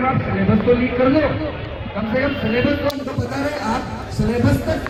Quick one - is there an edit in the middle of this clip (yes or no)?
no